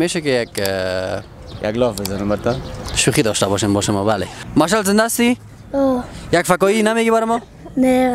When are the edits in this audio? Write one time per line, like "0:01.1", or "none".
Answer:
0:04.4

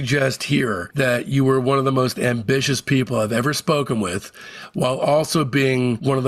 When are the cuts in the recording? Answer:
none

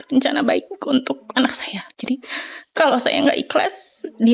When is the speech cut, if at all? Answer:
none

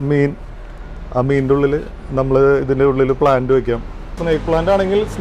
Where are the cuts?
0:04.2

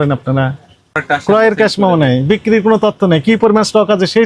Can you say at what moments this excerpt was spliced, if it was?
0:01.0

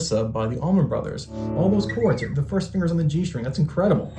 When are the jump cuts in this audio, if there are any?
0:01.4

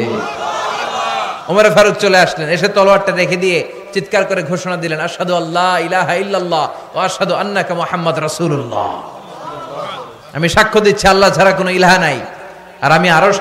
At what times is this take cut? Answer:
none

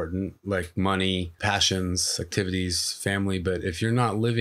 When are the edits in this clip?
0:01.4

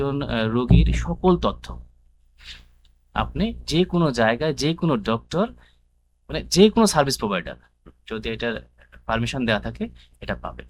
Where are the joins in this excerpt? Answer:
none

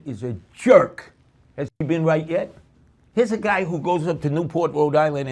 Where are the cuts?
0:01.8

